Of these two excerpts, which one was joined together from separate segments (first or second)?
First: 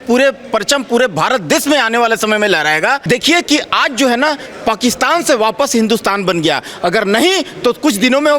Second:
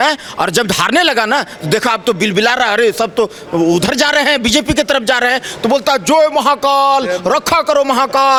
first